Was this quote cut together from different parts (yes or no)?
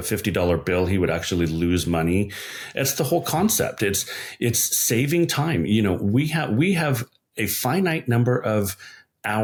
no